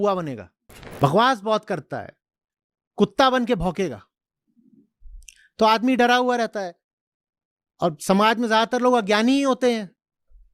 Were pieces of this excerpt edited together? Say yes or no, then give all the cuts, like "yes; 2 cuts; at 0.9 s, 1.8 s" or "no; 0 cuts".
yes; 1 cut; at 1.0 s